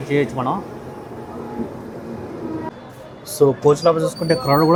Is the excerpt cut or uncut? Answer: uncut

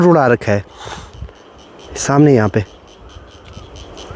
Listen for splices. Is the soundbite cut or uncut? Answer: uncut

